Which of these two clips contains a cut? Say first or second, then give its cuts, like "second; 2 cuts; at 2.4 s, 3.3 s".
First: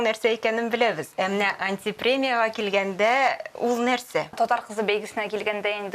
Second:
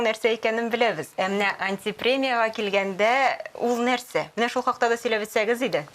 first; 1 cut; at 4.4 s